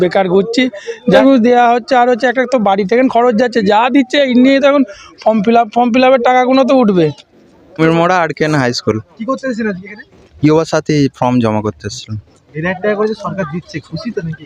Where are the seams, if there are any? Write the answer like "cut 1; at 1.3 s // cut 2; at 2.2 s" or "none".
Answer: cut 1; at 1.2 s // cut 2; at 7.6 s